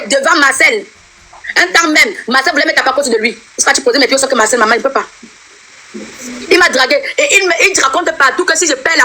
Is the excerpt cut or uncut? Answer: uncut